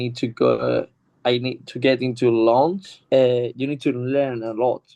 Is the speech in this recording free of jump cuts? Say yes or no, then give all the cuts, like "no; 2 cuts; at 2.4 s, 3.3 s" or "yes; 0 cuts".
no; 1 cut; at 2.9 s